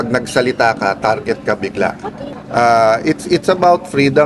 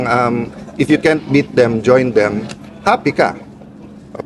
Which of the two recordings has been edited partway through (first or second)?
first